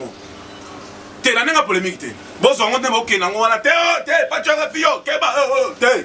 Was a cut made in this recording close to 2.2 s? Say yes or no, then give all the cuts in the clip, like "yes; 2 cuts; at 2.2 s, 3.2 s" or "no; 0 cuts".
no; 0 cuts